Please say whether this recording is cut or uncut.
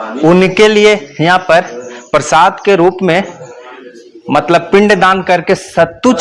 uncut